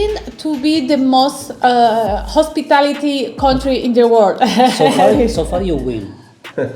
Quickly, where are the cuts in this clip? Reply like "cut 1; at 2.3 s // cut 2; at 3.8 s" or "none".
none